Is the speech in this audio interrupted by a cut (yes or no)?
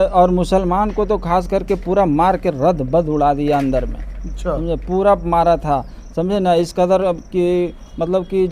no